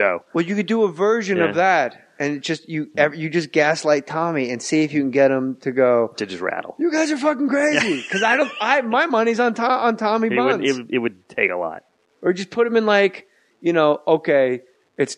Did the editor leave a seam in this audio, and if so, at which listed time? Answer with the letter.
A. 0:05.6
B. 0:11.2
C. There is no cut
B